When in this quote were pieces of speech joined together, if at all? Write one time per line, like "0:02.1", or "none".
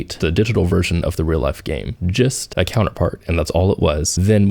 none